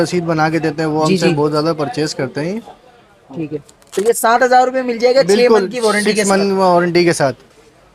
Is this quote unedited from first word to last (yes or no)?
yes